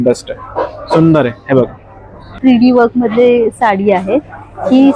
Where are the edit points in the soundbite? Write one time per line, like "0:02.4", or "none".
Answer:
0:02.3